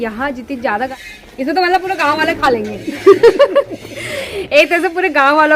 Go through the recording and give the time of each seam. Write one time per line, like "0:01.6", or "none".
0:00.9